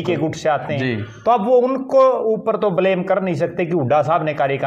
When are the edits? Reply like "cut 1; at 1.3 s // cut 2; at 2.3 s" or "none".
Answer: none